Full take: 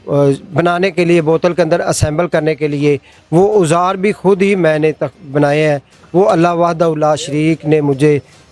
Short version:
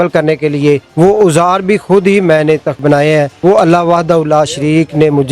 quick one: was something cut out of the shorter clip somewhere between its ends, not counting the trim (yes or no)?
yes